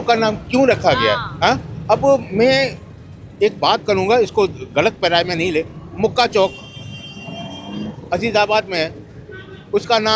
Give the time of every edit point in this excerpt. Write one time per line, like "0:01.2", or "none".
none